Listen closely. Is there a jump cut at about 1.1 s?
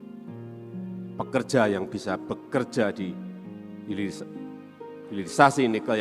yes; 1 cut; at 1.1 s

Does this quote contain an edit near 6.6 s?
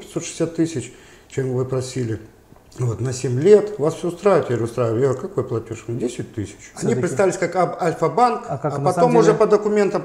yes; 1 cut; at 6.6 s

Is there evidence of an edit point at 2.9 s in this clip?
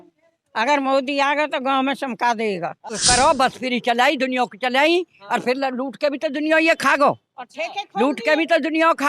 yes; 1 cut; at 2.9 s

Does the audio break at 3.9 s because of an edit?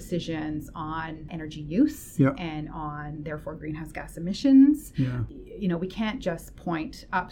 no; 2 cuts; at 1.3 s, 5.2 s

